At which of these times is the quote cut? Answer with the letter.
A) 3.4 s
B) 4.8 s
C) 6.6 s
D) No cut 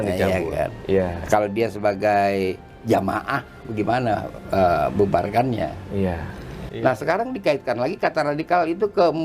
C